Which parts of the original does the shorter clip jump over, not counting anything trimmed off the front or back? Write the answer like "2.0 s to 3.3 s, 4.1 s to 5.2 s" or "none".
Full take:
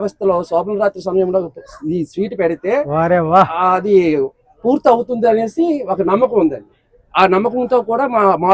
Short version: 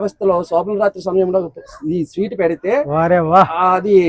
none